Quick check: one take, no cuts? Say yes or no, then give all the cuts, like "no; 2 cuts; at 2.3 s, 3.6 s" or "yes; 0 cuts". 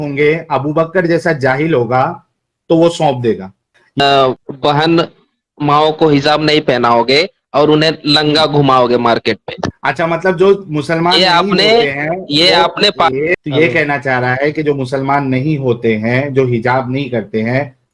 no; 1 cut; at 4.0 s